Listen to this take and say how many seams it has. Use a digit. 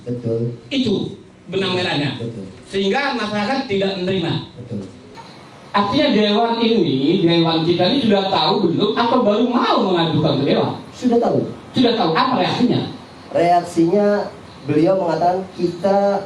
1